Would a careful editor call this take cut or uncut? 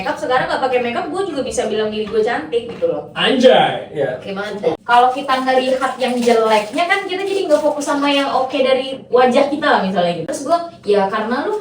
cut